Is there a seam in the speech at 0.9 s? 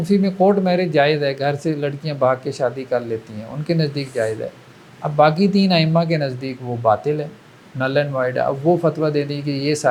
no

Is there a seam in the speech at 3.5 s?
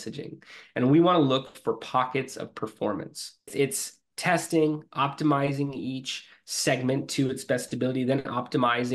yes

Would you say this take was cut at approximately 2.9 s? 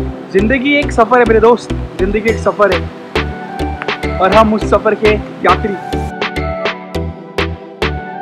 yes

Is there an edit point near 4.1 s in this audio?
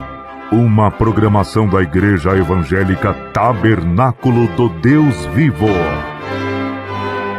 no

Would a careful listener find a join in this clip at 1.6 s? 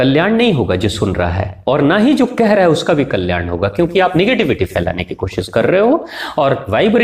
no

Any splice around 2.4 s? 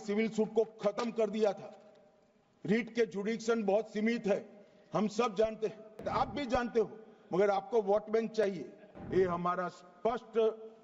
no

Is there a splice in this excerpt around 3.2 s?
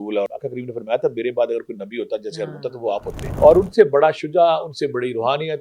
yes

